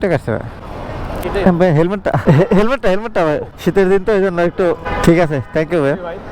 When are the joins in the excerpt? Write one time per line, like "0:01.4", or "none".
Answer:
none